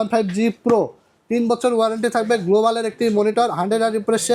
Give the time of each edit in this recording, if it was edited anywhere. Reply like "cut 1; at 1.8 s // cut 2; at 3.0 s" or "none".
none